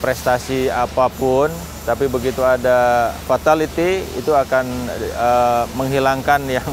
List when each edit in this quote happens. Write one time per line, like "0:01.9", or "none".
none